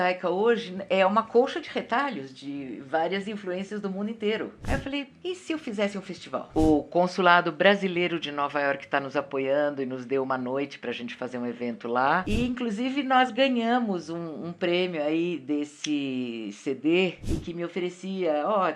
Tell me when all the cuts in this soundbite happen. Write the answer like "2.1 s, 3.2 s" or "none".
4.6 s, 6.5 s, 12.2 s, 17.2 s